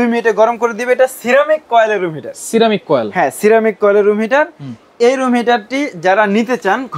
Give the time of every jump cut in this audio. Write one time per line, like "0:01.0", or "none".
none